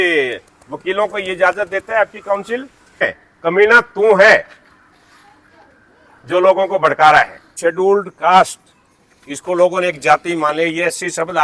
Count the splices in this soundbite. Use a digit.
2